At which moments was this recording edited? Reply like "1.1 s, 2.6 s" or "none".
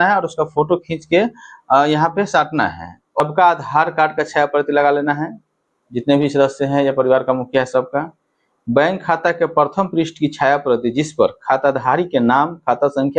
3.2 s

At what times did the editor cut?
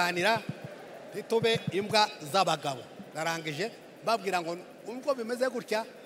none

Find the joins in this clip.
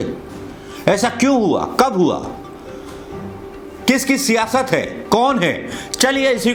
none

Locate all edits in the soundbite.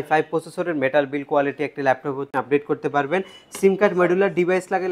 2.3 s

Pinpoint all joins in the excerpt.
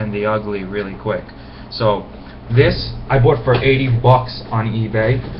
3.2 s

